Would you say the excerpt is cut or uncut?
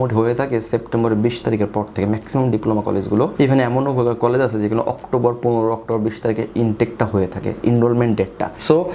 uncut